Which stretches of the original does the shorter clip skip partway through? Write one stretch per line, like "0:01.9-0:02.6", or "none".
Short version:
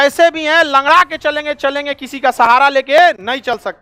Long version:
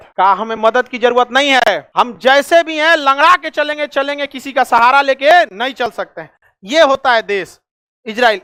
none